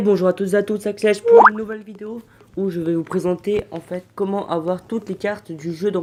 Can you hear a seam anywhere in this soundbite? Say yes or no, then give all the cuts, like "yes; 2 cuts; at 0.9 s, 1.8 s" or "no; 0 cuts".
no; 0 cuts